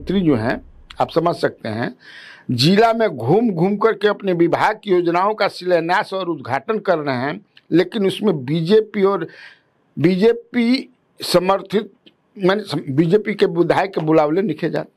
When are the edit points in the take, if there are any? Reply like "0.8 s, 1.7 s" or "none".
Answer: none